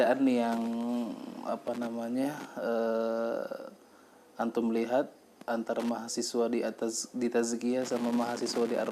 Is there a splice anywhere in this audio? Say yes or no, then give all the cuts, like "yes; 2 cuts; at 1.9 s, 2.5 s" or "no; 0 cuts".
no; 0 cuts